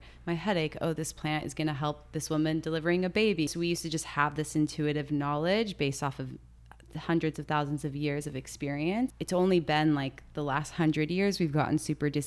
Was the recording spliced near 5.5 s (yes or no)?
no